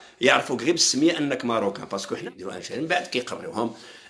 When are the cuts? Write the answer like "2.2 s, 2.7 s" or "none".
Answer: 2.1 s